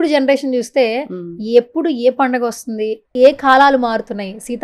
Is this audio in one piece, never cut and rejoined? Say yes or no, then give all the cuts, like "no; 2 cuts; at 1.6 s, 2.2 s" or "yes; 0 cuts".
yes; 0 cuts